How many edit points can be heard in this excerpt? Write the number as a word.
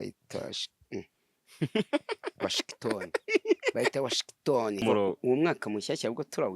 one